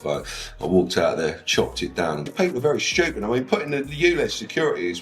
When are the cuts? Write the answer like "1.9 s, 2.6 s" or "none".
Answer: 2.3 s